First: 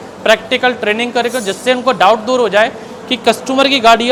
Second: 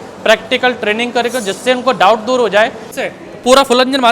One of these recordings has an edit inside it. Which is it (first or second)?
second